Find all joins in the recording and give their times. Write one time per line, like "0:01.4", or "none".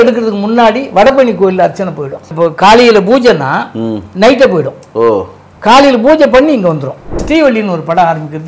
0:02.2
0:04.0
0:07.2